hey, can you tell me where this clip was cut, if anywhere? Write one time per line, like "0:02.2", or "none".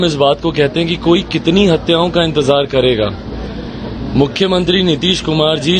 none